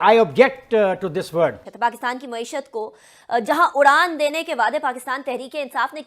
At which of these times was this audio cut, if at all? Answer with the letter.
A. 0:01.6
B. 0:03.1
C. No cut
A